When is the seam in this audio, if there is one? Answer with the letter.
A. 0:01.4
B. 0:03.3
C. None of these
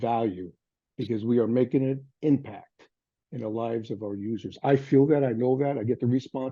C